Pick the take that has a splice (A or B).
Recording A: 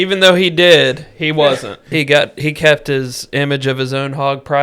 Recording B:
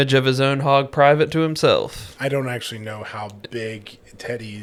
A